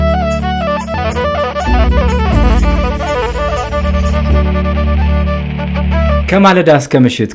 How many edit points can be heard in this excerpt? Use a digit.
1